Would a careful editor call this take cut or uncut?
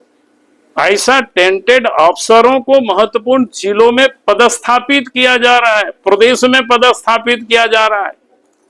uncut